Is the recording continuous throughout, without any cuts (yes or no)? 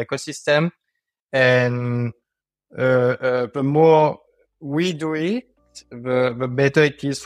yes